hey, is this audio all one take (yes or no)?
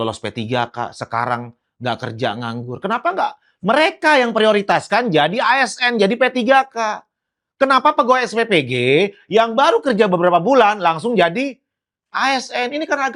yes